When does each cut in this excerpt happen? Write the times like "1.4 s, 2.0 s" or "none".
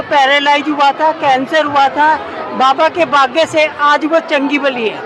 none